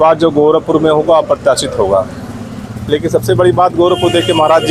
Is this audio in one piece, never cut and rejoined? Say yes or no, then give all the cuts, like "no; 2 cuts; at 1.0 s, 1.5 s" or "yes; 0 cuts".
yes; 0 cuts